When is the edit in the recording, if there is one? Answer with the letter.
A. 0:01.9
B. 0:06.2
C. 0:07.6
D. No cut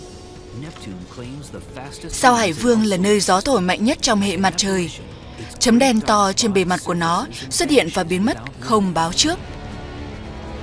D